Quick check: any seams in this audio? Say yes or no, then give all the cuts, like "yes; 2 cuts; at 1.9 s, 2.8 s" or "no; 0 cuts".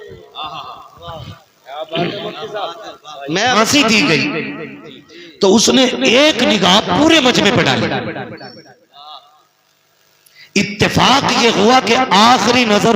yes; 1 cut; at 3.6 s